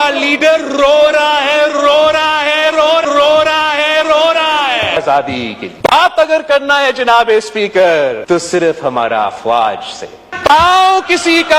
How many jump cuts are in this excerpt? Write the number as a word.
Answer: zero